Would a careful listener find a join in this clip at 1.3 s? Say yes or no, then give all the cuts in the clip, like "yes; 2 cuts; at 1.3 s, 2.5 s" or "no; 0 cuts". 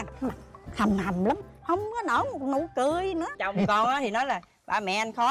no; 1 cut; at 3.4 s